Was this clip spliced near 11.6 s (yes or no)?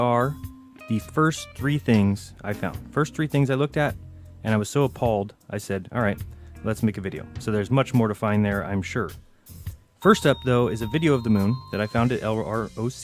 no